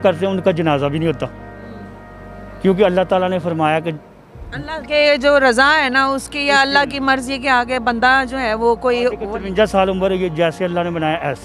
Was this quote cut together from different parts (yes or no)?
no